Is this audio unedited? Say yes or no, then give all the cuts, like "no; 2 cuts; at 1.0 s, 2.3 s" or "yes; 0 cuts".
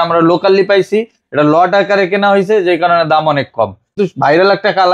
no; 1 cut; at 3.9 s